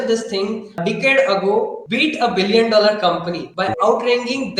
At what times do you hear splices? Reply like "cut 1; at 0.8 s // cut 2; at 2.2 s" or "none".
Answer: cut 1; at 0.8 s // cut 2; at 1.8 s // cut 3; at 3.7 s